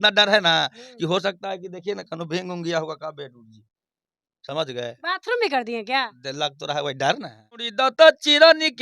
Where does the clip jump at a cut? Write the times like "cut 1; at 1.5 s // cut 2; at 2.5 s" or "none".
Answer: cut 1; at 7.7 s